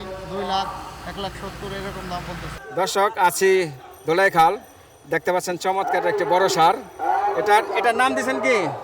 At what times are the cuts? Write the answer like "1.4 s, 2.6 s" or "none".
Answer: 2.5 s